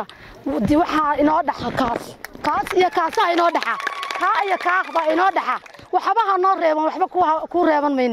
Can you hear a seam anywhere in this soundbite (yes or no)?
no